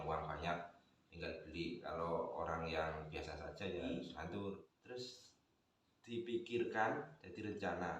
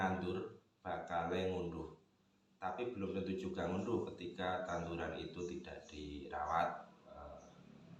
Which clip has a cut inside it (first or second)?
first